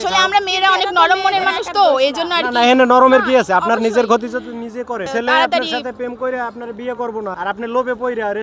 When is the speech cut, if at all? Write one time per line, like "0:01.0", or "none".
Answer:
0:05.1
0:07.3